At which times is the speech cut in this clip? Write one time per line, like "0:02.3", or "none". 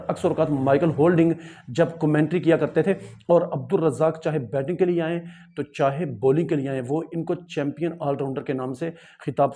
none